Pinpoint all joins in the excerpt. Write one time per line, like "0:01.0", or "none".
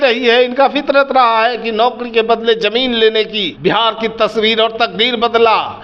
0:03.4